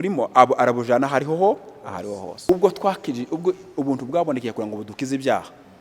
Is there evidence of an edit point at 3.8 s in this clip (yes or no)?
no